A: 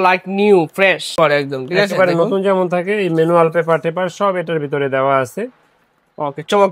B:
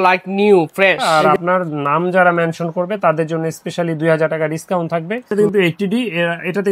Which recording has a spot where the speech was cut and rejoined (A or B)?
B